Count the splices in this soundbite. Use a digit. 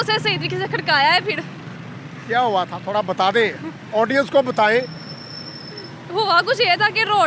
0